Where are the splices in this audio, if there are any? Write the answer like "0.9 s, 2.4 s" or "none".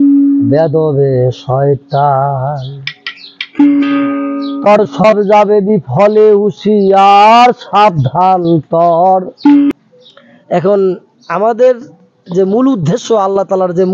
9.7 s